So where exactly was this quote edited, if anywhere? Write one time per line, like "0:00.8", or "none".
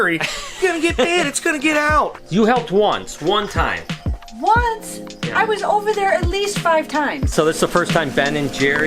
0:02.2
0:07.3

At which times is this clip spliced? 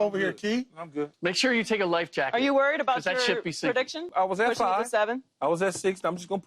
0:01.1
0:04.1

